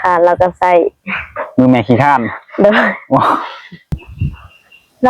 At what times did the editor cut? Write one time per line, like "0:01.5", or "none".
0:04.0